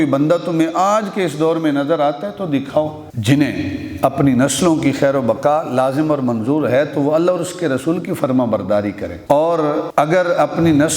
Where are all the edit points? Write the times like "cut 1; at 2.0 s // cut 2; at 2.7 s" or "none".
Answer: cut 1; at 3.1 s // cut 2; at 9.1 s